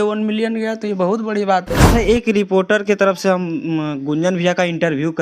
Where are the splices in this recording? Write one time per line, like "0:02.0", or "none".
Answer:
0:01.8